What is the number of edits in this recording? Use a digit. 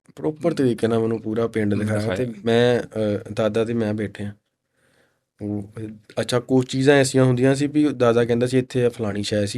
0